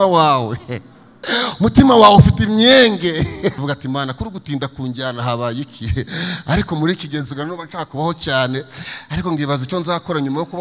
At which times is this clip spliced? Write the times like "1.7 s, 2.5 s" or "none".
3.7 s